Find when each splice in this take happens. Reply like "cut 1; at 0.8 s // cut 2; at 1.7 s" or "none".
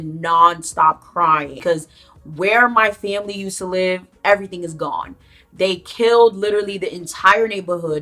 cut 1; at 1.5 s